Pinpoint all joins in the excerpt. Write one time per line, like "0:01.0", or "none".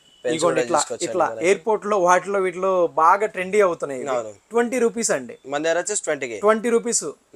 none